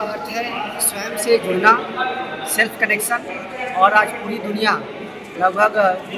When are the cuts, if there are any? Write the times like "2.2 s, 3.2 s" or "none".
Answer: none